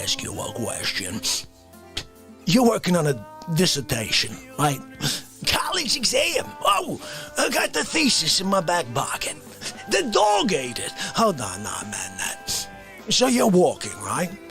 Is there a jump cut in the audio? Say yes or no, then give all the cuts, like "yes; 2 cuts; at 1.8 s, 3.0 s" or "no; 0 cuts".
no; 0 cuts